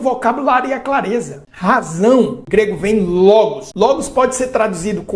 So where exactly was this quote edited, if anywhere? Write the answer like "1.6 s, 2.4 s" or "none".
1.4 s, 2.4 s, 3.6 s